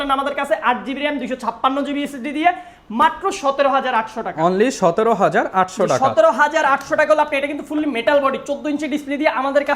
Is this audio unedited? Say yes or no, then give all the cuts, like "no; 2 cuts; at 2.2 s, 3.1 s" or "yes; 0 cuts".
yes; 0 cuts